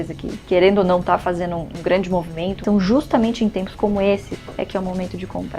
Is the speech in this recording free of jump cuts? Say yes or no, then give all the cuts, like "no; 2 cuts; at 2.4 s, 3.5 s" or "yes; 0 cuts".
no; 3 cuts; at 1.7 s, 2.6 s, 4.3 s